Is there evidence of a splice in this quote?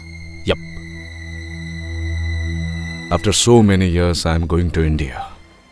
yes; 1 cut; at 2.9 s

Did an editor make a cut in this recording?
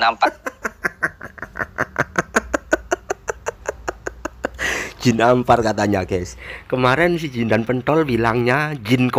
no; 0 cuts

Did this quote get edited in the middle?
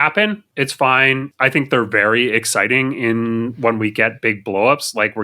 yes; 1 cut; at 1.3 s

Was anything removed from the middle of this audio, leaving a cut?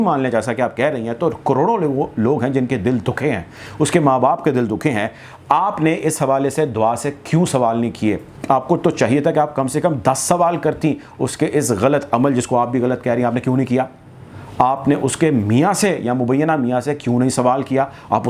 no; 0 cuts

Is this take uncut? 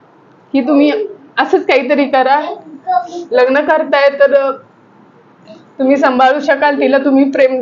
yes; 0 cuts

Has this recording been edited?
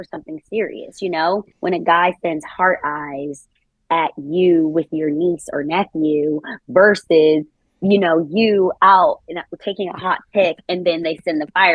yes; 1 cut; at 1.5 s

